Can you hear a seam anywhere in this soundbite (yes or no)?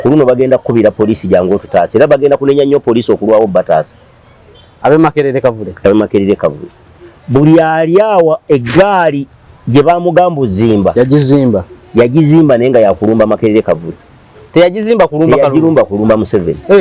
no